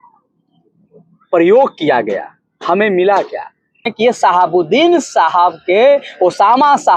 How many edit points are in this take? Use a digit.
1